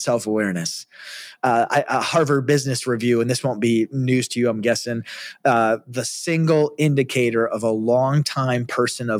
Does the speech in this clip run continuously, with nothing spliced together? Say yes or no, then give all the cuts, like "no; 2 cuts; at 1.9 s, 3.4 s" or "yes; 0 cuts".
yes; 0 cuts